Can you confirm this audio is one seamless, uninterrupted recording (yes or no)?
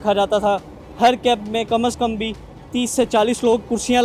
yes